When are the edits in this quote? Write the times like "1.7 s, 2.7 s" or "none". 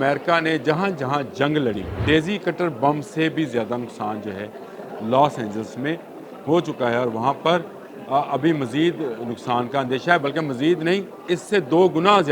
1.9 s, 11.2 s